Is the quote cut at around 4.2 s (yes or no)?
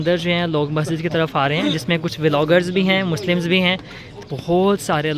yes